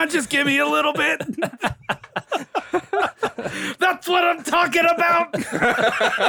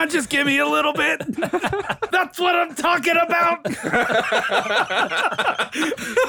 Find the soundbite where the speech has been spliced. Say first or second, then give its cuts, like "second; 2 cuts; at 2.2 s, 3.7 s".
second; 1 cut; at 2.0 s